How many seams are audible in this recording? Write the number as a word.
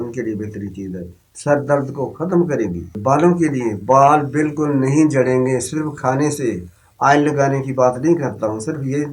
one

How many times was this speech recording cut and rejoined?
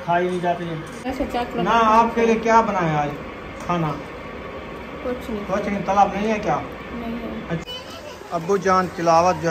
two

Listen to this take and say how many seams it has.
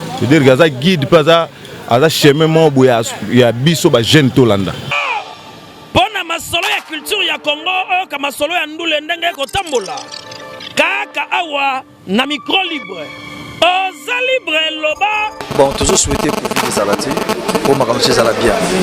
one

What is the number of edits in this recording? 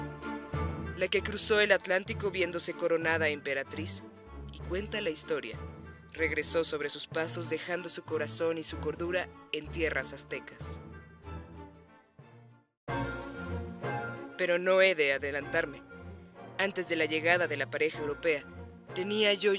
one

